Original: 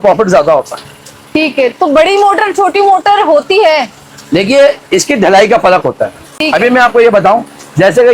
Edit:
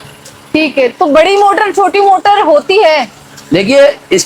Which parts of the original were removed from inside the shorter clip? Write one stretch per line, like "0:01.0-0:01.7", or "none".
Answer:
none